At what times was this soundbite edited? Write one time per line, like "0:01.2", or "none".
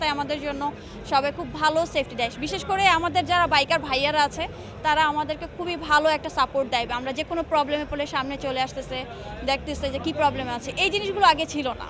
none

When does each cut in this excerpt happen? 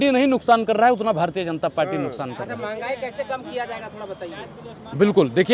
none

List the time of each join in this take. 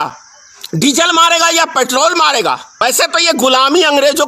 0:02.8

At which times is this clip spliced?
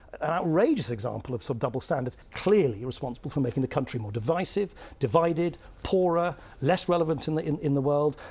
0:02.3

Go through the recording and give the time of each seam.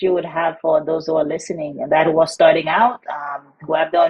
none

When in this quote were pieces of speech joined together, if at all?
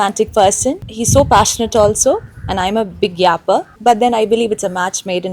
0:03.7

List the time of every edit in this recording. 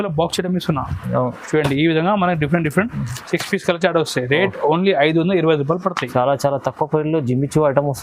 none

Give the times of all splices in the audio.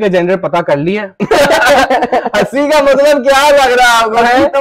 none

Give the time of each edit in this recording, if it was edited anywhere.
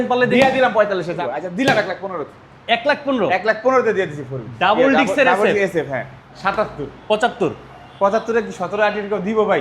0:01.2
0:06.2

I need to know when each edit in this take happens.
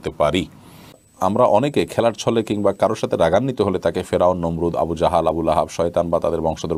0:01.0

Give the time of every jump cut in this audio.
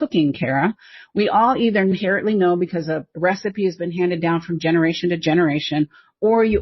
0:01.9

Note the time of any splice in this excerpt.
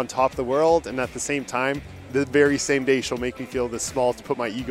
none

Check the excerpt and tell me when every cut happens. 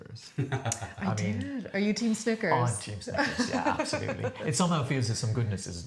none

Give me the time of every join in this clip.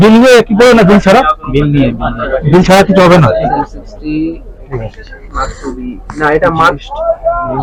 none

